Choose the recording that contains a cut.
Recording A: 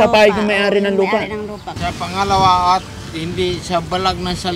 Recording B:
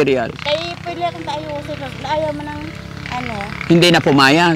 A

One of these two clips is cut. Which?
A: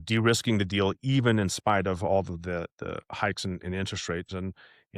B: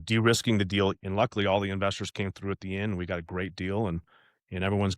B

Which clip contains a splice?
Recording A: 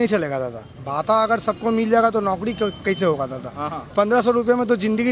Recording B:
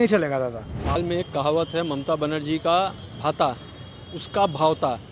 B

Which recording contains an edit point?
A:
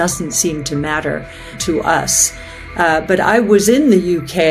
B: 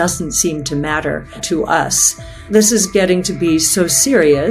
B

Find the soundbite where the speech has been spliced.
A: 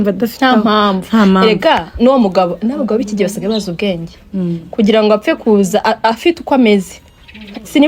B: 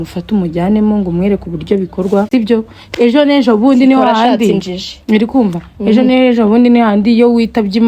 B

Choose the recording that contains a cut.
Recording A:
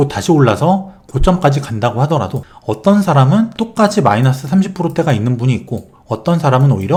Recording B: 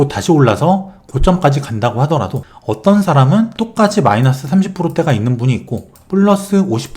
B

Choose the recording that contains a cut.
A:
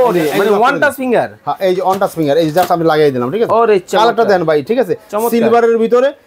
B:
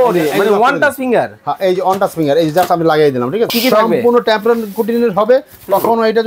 B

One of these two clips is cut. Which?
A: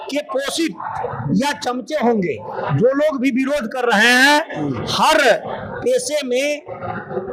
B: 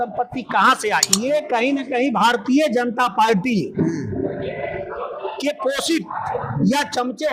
B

